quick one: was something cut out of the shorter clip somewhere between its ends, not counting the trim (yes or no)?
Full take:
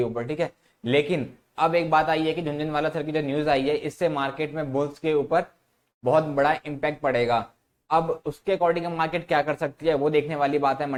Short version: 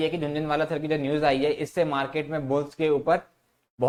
no